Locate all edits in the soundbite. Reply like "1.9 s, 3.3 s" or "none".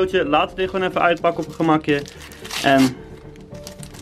none